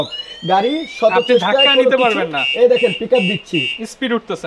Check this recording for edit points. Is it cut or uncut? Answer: uncut